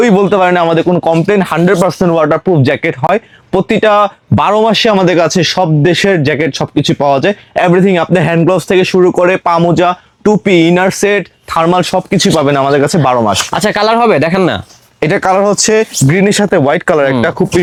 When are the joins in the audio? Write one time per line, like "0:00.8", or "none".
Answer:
none